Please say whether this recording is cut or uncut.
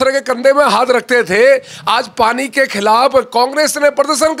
uncut